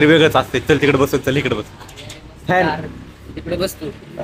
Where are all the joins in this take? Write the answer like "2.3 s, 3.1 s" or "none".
none